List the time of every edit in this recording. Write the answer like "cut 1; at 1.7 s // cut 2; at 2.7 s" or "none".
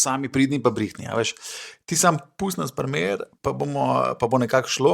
cut 1; at 3.3 s